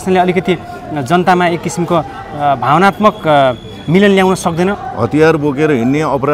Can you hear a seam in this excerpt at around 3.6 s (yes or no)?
no